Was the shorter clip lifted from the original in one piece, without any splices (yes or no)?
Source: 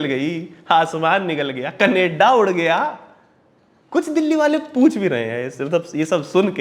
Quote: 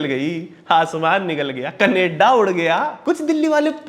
no